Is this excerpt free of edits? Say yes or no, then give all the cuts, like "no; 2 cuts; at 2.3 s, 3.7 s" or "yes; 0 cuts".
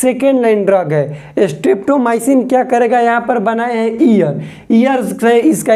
yes; 0 cuts